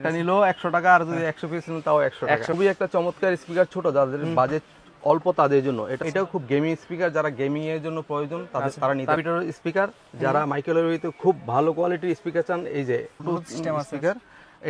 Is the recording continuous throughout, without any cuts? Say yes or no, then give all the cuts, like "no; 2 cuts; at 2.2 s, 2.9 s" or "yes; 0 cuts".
no; 4 cuts; at 2.5 s, 6.0 s, 9.2 s, 13.2 s